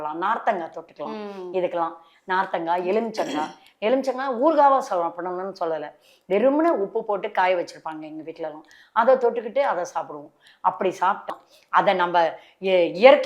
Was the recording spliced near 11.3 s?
yes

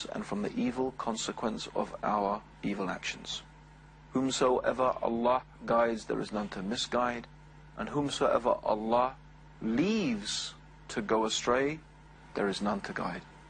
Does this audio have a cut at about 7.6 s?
yes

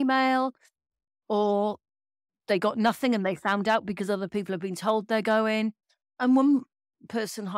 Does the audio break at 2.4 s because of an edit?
no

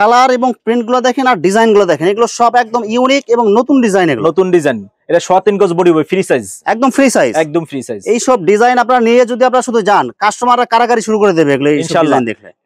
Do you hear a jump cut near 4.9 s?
no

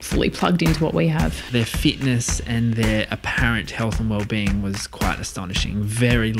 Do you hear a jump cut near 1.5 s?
yes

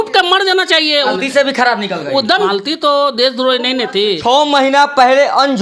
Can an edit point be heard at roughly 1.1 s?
yes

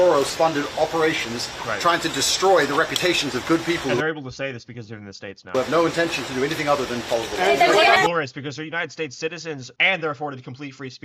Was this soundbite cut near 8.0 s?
yes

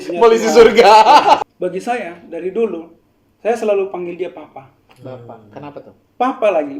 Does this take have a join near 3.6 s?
no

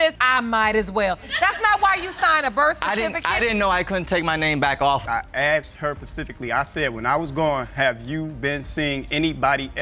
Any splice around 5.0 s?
yes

